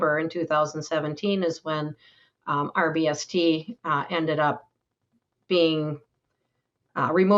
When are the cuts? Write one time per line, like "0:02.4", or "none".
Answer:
none